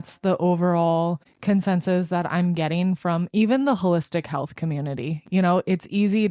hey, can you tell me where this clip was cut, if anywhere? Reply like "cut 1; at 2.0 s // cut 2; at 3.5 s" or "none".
none